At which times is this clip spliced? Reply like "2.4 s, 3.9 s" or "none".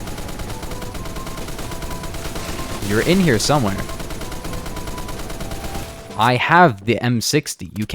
none